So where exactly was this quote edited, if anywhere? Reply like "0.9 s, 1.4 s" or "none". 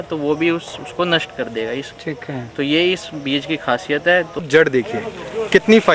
4.4 s